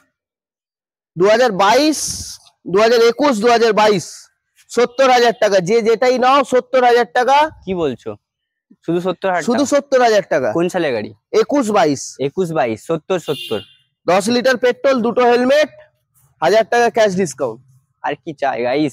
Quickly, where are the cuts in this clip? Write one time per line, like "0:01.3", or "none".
none

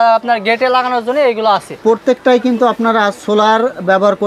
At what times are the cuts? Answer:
0:01.7

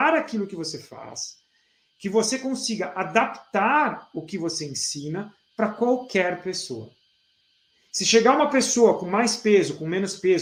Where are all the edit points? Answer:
none

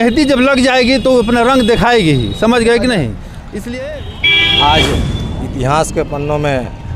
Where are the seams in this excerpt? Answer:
0:03.8

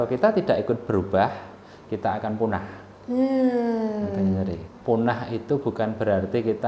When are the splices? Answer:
0:04.7

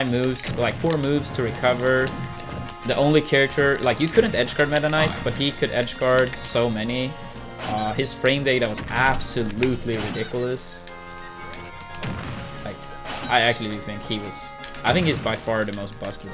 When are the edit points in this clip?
none

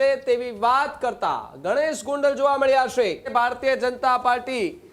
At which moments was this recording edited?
0:03.3

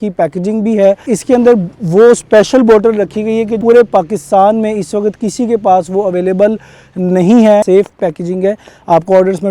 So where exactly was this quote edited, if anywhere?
0:01.0
0:03.6
0:07.6

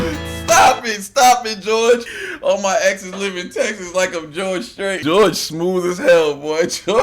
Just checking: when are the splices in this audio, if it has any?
0:02.1
0:05.0

